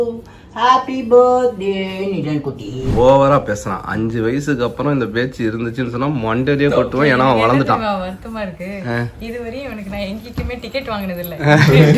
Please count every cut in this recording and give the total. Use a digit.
1